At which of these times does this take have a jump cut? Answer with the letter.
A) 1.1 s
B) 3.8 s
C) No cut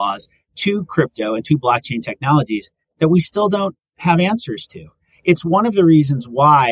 C